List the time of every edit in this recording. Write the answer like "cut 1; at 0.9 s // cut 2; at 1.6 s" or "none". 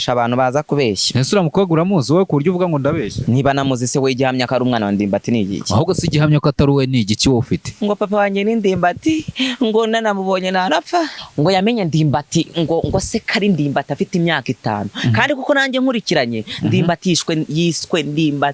cut 1; at 3.2 s // cut 2; at 4.5 s // cut 3; at 7.7 s // cut 4; at 11.2 s